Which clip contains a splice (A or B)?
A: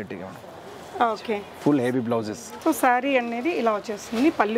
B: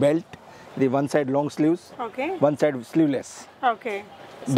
A